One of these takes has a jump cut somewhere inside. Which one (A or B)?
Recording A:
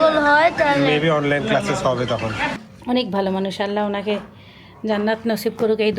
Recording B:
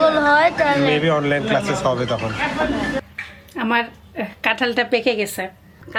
A